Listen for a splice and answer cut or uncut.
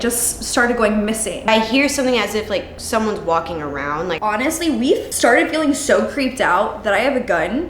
cut